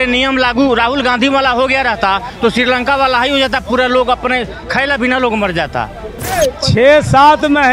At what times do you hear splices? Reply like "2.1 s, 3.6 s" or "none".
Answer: 6.3 s